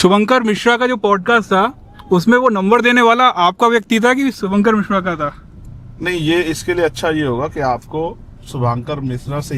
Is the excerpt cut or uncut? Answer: uncut